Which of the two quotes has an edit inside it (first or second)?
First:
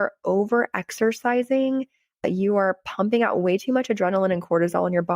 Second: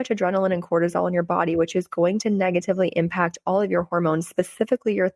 first